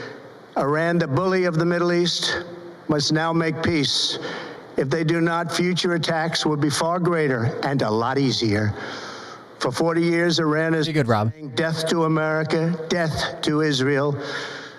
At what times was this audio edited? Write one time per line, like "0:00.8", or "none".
0:08.0